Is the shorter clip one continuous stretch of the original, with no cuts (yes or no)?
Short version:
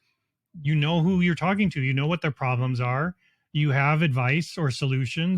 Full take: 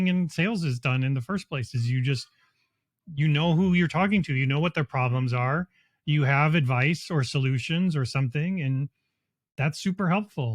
yes